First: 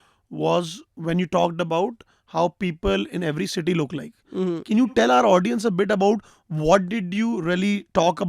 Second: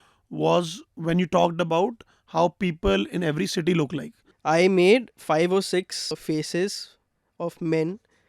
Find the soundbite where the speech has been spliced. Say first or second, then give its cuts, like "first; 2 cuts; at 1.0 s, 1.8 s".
second; 2 cuts; at 4.2 s, 6.2 s